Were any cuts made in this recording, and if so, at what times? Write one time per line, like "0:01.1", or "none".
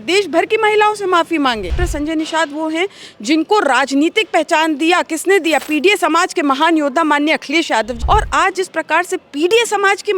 0:01.8
0:08.0

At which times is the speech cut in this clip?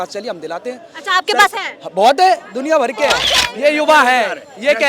0:03.2

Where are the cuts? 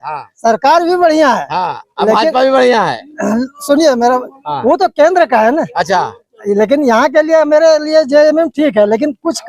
none

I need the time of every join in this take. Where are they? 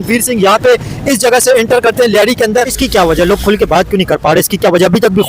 0:02.8

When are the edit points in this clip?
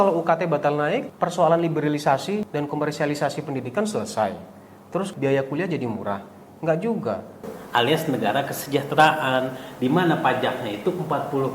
0:01.1
0:02.5
0:05.1
0:07.5

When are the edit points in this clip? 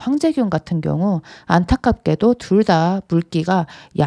none

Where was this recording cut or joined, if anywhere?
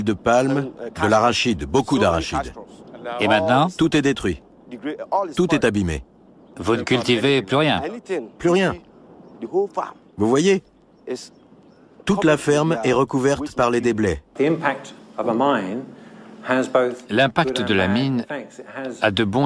0:14.3

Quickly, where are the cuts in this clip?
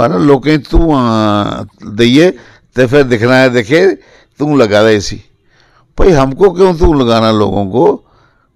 none

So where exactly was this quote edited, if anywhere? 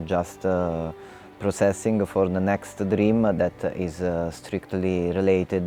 none

